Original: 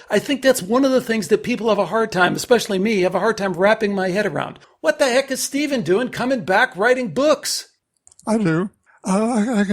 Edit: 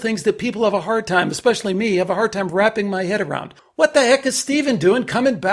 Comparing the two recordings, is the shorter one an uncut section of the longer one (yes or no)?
yes